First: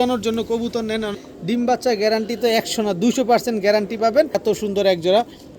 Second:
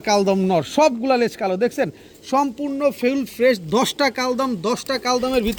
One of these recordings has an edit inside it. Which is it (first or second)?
first